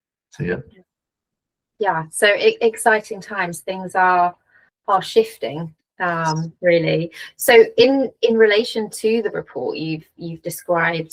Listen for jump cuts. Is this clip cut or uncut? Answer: uncut